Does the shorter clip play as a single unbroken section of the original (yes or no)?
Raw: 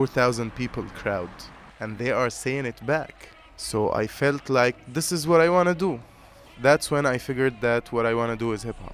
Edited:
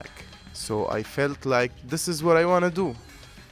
yes